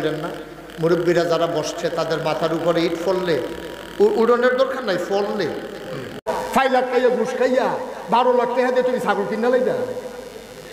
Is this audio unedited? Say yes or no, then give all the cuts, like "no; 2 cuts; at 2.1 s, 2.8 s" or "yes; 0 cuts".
no; 1 cut; at 6.2 s